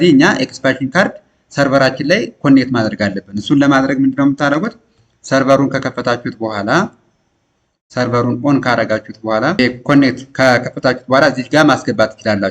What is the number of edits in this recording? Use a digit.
1